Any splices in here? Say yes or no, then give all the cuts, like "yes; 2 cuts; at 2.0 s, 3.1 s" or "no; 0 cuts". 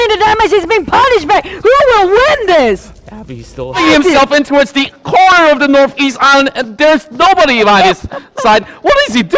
yes; 1 cut; at 3.8 s